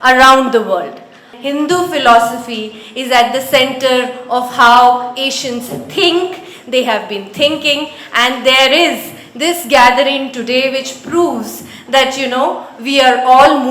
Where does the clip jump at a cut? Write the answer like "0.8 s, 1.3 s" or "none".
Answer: 1.3 s